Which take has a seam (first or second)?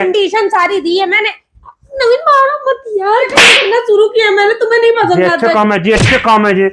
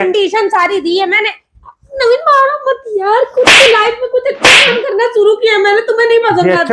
first